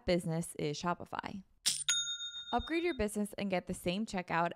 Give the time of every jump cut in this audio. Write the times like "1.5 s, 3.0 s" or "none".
2.0 s